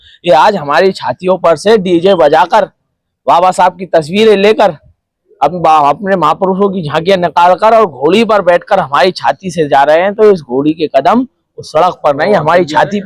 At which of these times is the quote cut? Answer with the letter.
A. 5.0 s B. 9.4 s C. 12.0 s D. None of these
D